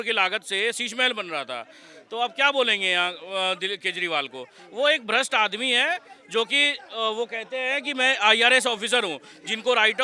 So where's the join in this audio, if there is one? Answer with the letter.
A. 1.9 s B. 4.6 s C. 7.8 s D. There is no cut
D